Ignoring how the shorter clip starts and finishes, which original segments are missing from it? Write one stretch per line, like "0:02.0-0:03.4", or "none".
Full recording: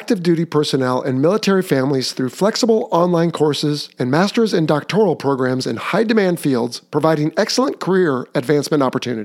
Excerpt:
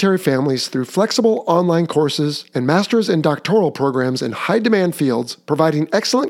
none